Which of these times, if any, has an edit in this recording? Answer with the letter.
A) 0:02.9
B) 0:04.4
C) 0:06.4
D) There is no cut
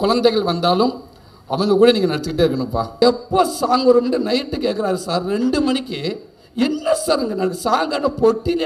A